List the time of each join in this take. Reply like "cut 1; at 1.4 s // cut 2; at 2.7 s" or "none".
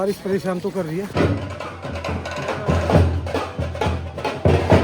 cut 1; at 1.1 s